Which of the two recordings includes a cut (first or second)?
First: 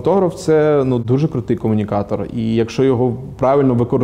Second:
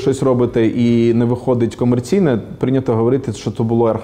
first